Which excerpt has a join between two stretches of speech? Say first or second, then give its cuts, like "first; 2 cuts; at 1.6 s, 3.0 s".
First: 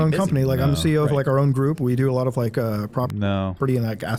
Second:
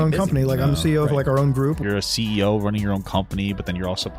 second; 1 cut; at 1.8 s